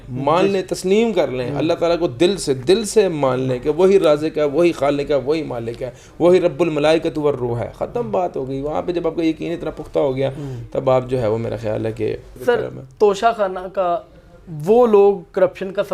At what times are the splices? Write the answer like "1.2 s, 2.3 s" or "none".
none